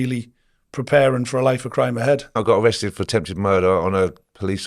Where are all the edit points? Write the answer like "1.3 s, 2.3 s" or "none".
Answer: 2.3 s

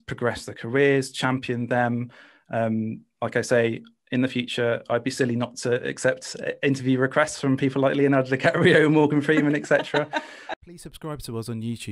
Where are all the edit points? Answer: 10.4 s

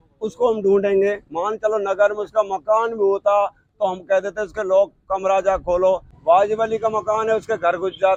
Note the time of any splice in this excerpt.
none

